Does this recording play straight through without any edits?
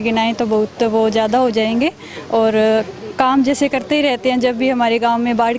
yes; 0 cuts

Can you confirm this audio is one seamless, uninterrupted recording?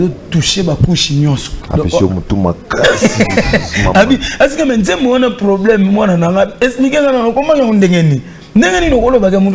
yes; 0 cuts

